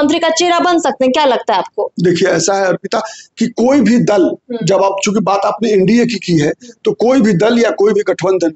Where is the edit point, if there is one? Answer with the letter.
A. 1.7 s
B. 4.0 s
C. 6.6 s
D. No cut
D